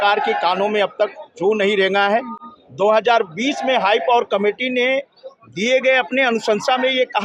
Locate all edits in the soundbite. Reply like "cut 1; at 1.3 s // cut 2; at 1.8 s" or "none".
none